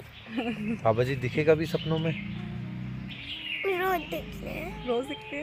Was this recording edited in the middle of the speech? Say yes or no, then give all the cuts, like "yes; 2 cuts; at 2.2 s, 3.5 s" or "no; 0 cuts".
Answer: no; 0 cuts